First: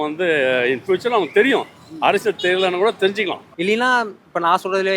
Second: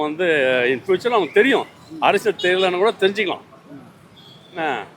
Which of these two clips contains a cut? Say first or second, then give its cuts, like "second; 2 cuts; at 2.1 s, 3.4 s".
first; 1 cut; at 3.5 s